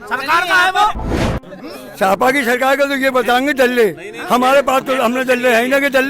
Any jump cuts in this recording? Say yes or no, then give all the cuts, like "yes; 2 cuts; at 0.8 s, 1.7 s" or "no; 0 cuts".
yes; 1 cut; at 1.1 s